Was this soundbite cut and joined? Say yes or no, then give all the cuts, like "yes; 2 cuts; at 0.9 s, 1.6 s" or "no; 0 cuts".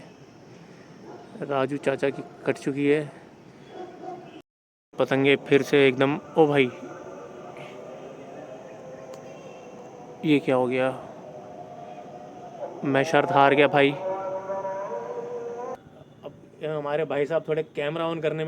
yes; 2 cuts; at 4.5 s, 15.8 s